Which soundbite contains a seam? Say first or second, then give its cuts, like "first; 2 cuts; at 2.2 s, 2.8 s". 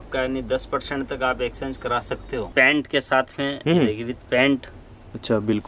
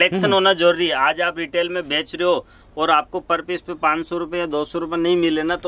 first; 1 cut; at 2.4 s